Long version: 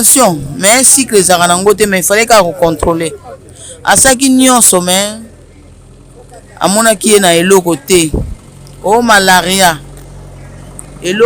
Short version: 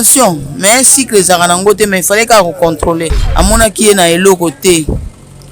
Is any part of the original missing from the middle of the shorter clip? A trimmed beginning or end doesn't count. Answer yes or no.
yes